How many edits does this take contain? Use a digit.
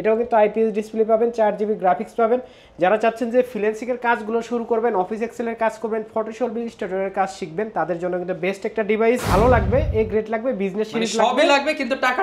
1